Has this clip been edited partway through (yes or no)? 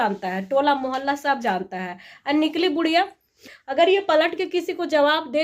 yes